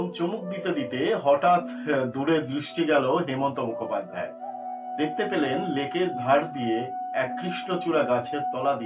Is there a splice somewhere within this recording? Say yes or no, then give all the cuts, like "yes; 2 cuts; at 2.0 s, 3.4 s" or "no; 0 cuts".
no; 0 cuts